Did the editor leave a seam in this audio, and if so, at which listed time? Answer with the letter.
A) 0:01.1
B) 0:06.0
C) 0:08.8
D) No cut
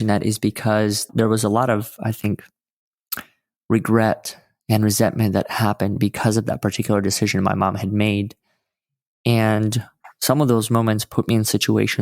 A